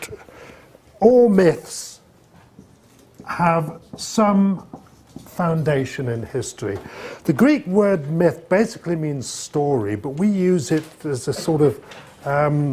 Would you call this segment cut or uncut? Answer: cut